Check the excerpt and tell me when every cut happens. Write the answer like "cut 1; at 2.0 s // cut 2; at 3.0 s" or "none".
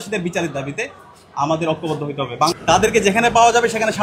cut 1; at 2.5 s